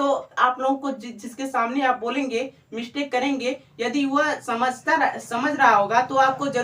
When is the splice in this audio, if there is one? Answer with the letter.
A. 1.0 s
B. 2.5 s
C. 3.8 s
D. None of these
D